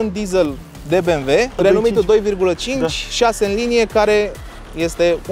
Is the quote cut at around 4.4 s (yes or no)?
no